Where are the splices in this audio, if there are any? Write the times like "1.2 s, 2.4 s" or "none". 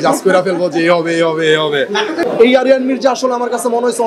2.2 s